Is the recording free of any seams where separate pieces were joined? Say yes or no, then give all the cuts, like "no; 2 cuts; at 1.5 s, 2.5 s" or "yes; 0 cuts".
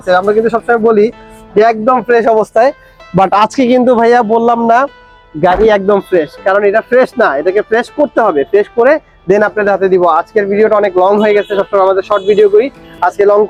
yes; 0 cuts